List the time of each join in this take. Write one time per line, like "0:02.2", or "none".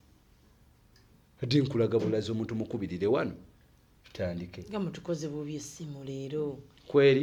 0:01.1